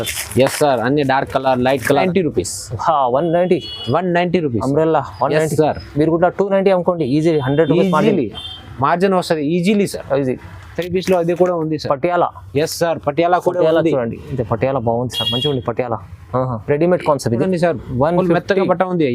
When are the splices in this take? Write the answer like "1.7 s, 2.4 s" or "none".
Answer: 2.0 s, 10.8 s, 17.4 s